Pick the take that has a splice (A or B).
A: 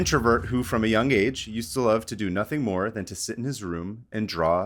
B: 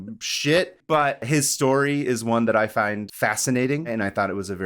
B